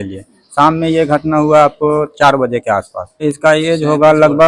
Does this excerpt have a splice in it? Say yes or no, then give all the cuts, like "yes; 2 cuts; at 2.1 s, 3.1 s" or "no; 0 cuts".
yes; 1 cut; at 3.2 s